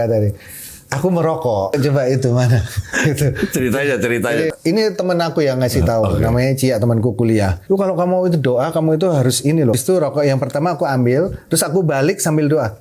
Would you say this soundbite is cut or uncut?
cut